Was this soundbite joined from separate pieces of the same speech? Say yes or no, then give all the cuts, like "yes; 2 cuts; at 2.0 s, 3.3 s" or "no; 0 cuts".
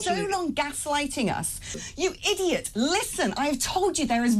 yes; 1 cut; at 1.8 s